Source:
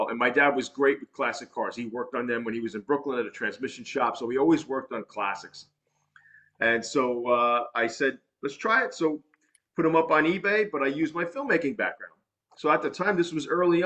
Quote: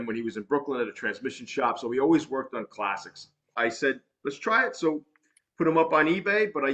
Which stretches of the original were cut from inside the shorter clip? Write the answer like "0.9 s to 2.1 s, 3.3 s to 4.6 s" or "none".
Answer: 5.9 s to 7.7 s